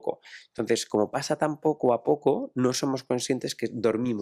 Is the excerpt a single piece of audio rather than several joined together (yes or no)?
yes